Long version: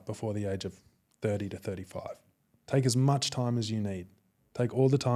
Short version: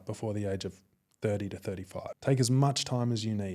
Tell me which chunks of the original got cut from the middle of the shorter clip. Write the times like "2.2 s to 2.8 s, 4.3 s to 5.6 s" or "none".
2.1 s to 2.6 s

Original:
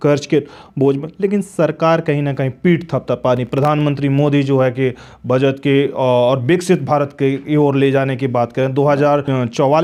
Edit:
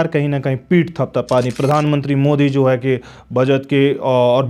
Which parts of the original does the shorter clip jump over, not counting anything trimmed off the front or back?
none

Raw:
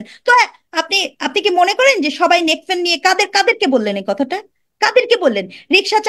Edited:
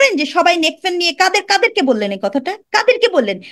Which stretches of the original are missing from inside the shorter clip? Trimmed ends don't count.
4.4 s to 4.7 s

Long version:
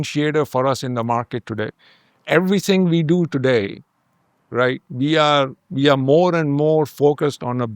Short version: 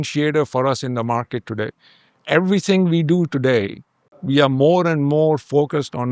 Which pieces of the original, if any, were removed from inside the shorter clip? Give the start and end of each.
4.1 s to 5.6 s

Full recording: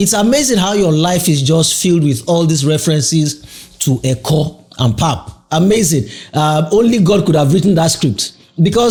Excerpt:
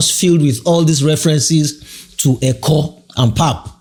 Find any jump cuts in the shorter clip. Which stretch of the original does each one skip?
none

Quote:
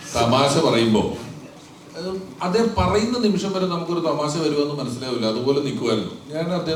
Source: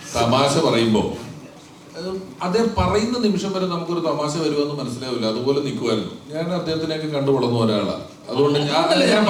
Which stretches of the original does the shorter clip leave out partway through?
none

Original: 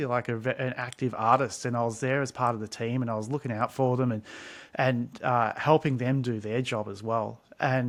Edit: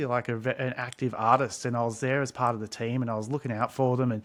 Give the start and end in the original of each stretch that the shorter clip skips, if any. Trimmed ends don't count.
none

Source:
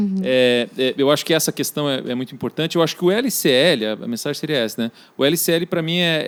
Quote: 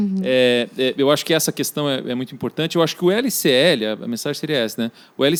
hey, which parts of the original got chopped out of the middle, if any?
none

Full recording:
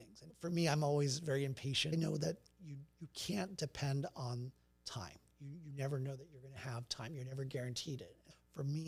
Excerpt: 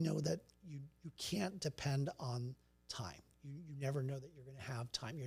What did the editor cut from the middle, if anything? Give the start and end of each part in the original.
none

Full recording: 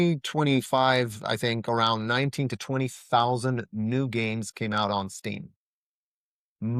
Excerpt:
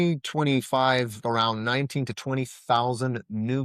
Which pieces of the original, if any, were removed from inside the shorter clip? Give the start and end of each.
1.2 s to 1.6 s

